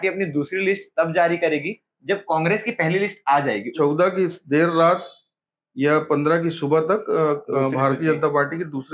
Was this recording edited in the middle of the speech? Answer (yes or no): yes